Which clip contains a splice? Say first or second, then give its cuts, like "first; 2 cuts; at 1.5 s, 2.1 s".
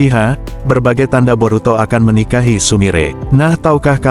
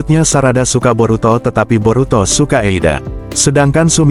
first; 1 cut; at 3.2 s